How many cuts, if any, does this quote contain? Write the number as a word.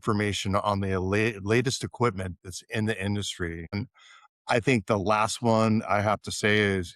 one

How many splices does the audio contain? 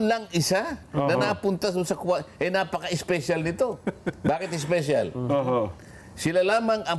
zero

